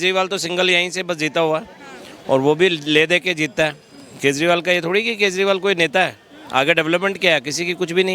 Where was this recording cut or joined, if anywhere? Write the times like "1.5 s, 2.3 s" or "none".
none